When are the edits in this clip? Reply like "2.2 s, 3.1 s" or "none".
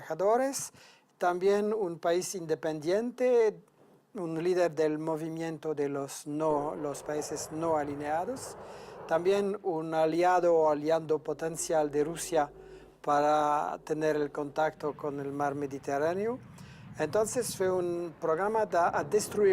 14.8 s